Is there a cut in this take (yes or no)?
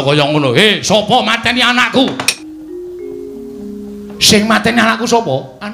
yes